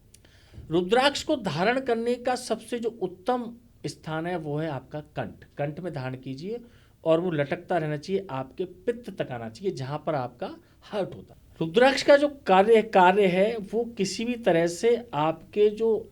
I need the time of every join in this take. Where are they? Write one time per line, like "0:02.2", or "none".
0:11.3